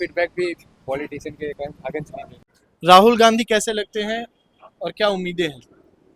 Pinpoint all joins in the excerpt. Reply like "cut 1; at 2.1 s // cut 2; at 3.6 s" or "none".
cut 1; at 2.6 s